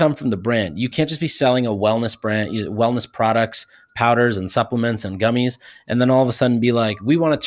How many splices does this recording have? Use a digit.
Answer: 1